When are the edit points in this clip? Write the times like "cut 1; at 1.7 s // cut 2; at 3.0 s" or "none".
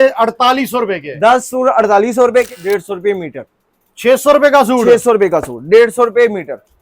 cut 1; at 2.5 s